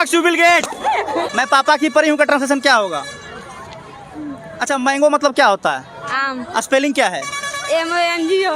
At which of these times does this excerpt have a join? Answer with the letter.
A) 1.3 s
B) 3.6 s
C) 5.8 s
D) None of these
A